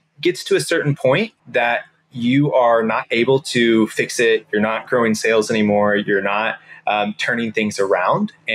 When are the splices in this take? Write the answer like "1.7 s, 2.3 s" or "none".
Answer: 1.4 s